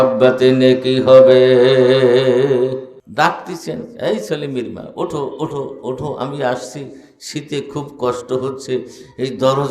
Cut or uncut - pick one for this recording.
cut